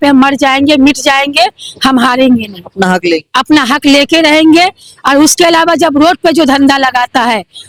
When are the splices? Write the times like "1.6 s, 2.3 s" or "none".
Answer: none